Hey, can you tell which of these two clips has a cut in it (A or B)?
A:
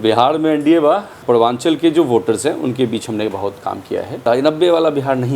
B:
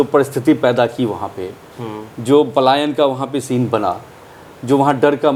A